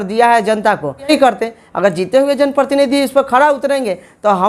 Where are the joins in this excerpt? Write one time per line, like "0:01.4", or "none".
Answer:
0:01.1